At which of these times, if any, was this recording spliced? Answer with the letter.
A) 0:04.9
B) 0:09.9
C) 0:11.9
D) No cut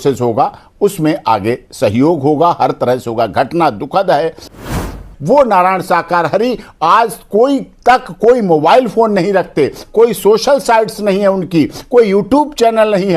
A